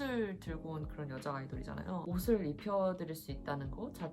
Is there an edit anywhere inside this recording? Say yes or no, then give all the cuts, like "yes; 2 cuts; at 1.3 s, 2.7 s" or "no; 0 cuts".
yes; 1 cut; at 2.1 s